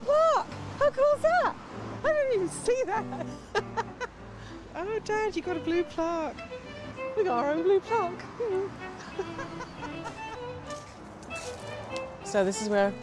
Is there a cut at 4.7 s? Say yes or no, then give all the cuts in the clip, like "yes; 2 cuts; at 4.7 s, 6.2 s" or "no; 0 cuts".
no; 1 cut; at 3.5 s